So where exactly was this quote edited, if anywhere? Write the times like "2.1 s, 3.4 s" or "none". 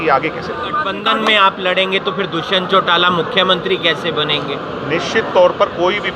0.9 s